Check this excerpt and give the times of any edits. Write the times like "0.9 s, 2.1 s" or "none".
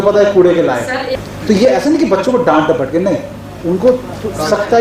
1.0 s